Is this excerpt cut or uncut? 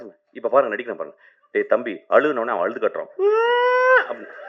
uncut